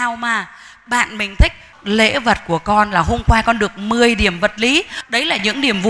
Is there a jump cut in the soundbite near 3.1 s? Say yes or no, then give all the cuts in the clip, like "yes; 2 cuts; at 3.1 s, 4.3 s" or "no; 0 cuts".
no; 2 cuts; at 1.7 s, 5.0 s